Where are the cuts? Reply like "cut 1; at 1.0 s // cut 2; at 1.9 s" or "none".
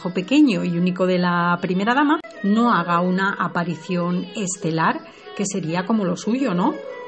cut 1; at 3.8 s